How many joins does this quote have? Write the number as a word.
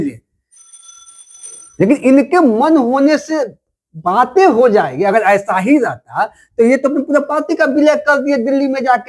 zero